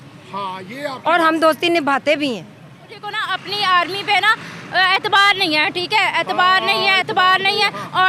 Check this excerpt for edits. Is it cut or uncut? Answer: cut